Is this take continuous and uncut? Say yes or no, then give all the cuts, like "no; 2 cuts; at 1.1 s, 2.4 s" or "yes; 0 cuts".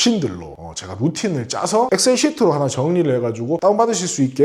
yes; 0 cuts